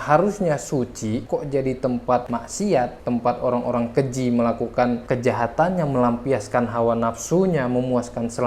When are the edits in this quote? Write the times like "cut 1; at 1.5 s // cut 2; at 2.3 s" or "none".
cut 1; at 2.3 s